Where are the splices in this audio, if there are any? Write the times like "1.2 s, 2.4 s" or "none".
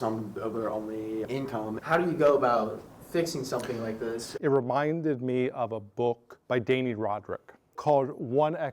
1.4 s, 4.3 s, 6.3 s, 7.8 s